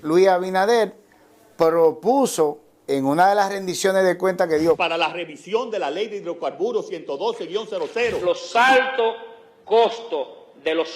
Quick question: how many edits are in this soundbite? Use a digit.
2